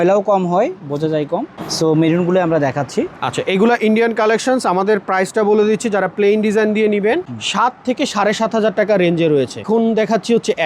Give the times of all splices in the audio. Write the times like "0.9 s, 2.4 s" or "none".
1.5 s, 9.6 s

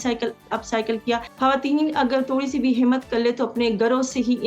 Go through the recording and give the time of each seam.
1.3 s

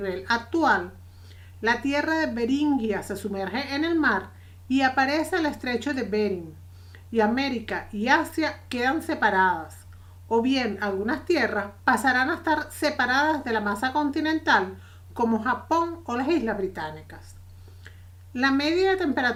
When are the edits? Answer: none

